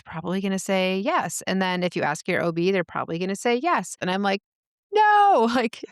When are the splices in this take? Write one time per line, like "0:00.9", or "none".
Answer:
0:04.0